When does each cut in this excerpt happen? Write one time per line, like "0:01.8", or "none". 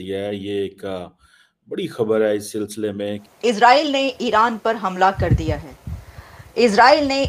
0:03.2